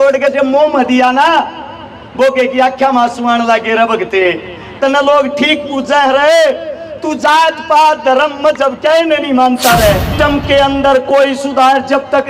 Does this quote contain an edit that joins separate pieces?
yes; 1 cut; at 10.1 s

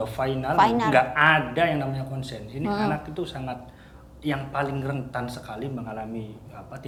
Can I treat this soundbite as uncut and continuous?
yes; 0 cuts

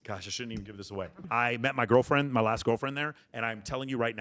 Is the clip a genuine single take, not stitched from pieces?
no; 1 cut; at 1.2 s

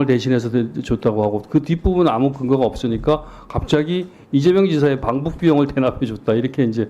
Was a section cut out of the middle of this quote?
no; 0 cuts

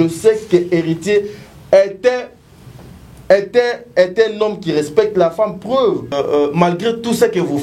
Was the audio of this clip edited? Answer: yes; 1 cut; at 6.1 s

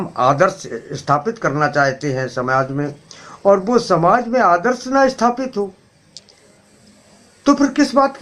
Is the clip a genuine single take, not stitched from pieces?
yes; 0 cuts

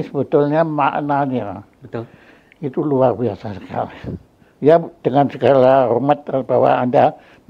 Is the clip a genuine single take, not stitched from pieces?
yes; 0 cuts

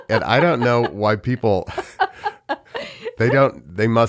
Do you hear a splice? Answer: no; 0 cuts

